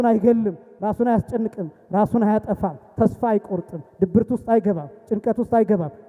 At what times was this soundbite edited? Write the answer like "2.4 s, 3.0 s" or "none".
none